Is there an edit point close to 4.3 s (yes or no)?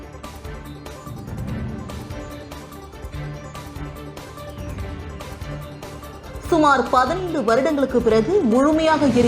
no